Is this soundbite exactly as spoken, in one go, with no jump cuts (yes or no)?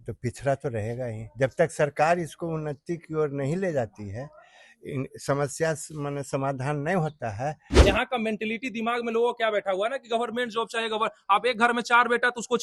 no